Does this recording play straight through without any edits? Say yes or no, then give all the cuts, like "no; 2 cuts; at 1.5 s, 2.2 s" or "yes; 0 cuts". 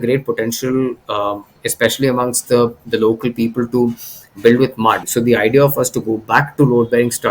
no; 1 cut; at 5.1 s